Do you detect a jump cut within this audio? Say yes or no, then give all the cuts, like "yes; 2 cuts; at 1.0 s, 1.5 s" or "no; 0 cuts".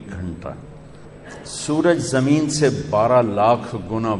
yes; 1 cut; at 0.9 s